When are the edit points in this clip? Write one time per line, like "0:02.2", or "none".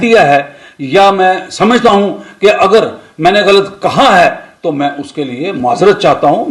none